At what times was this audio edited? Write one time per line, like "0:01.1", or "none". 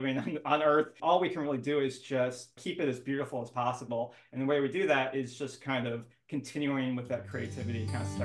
0:01.0
0:02.6